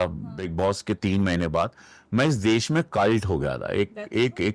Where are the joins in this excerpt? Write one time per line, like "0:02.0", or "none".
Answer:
none